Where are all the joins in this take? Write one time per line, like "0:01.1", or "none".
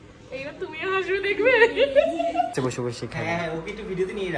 0:02.5